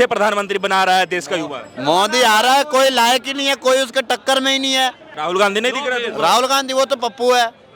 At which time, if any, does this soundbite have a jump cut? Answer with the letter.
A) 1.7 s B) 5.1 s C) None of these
B